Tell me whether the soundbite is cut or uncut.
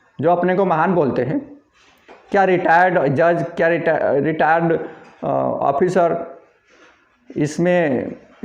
uncut